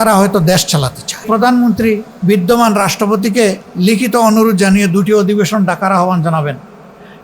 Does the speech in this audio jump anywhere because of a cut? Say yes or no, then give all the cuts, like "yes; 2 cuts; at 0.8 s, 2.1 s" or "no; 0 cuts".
yes; 2 cuts; at 1.2 s, 2.1 s